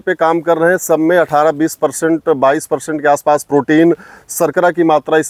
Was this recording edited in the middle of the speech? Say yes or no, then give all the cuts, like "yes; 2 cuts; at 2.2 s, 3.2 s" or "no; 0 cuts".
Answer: no; 0 cuts